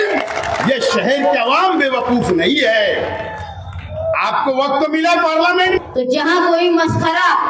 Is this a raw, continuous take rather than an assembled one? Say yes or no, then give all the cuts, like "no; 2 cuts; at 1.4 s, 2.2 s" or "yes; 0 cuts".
no; 1 cut; at 5.8 s